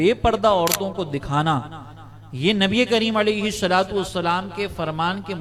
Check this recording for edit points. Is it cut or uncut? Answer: uncut